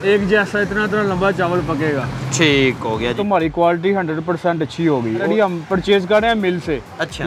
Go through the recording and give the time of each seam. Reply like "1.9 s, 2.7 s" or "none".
3.2 s, 5.3 s